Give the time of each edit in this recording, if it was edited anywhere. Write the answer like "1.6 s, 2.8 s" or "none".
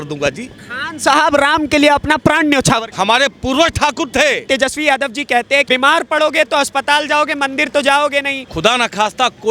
2.9 s, 4.5 s, 5.7 s, 8.4 s